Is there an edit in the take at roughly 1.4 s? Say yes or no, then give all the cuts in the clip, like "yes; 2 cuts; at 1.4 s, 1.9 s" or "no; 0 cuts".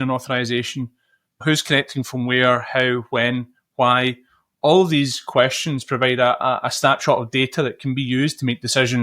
yes; 1 cut; at 1.4 s